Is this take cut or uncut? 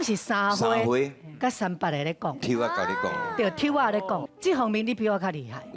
cut